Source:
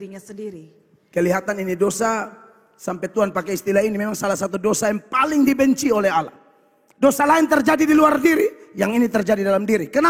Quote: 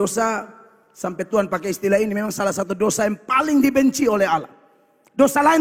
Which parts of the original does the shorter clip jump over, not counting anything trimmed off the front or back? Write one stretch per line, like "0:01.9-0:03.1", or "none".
none

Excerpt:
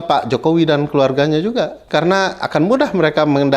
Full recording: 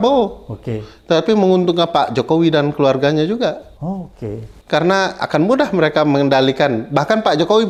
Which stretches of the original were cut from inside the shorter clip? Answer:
0:03.6-0:04.6

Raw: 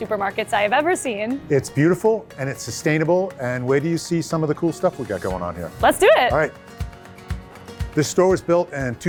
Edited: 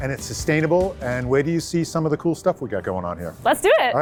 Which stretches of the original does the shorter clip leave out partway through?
none

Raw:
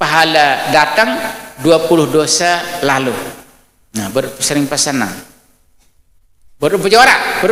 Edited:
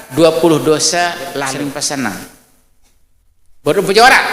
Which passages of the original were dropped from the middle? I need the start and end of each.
0:02.9-0:04.3

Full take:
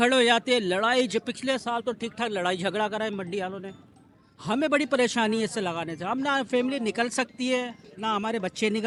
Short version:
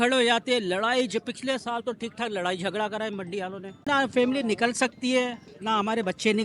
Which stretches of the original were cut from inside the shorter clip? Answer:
0:03.9-0:06.2

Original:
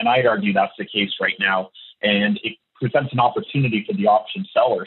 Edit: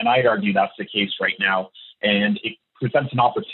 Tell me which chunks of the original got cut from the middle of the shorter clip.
none

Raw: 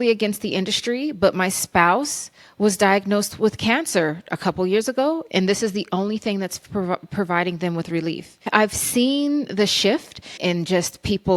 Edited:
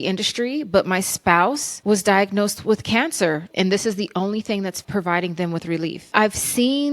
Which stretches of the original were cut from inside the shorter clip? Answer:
0:02.2-0:02.4
0:04.2-0:05.2
0:06.6-0:07.1
0:08.2-0:08.4

